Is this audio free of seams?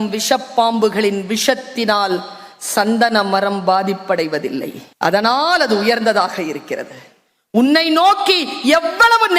no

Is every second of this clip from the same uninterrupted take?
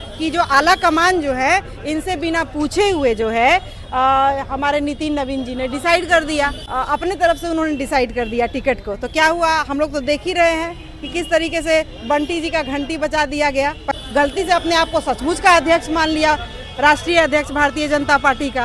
no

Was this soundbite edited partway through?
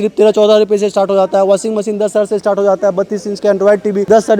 no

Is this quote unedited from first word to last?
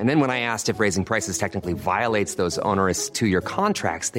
yes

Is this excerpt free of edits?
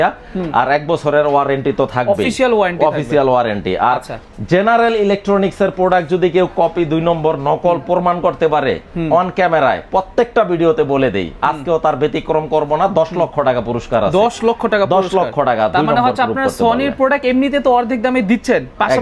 yes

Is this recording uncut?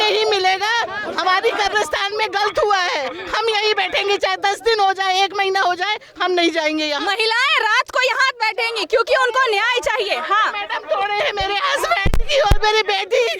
yes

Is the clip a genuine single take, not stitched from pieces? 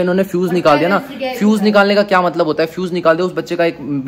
yes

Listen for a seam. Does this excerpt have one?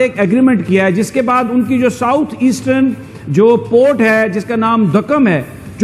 no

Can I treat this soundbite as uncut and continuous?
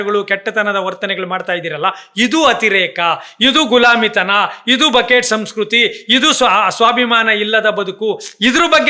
yes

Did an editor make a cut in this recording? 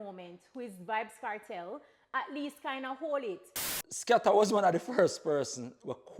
yes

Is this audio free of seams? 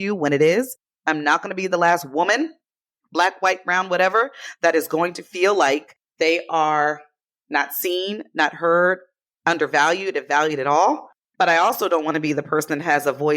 no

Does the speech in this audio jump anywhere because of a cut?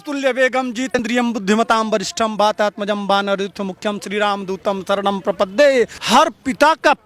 yes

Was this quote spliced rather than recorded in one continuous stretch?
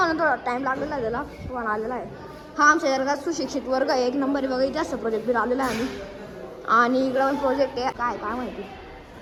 no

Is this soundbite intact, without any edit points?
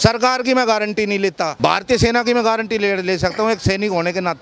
no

